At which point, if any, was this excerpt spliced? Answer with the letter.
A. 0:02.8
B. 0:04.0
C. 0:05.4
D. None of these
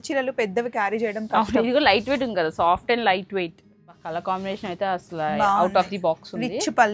B